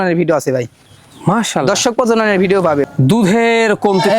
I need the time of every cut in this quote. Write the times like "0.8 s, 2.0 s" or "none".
2.8 s